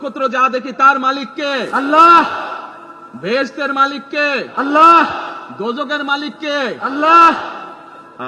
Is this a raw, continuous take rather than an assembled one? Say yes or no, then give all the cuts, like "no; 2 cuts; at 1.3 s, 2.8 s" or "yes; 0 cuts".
yes; 0 cuts